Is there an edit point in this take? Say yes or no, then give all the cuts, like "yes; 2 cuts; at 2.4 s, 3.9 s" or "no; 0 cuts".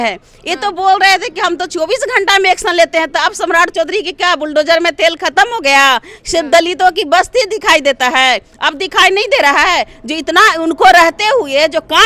no; 0 cuts